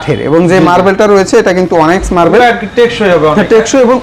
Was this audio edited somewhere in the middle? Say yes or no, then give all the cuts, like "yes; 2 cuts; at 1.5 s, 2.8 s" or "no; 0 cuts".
no; 0 cuts